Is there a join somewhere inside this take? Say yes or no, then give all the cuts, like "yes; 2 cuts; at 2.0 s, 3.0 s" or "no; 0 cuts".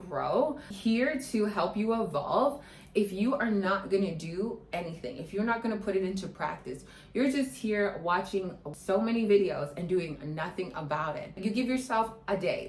yes; 1 cut; at 11.4 s